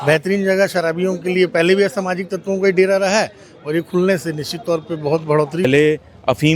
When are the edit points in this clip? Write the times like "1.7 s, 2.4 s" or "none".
5.6 s